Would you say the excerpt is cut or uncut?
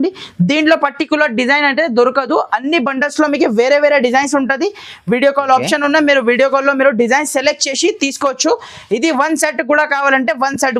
uncut